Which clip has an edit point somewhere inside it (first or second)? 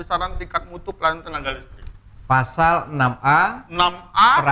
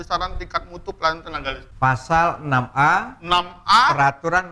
second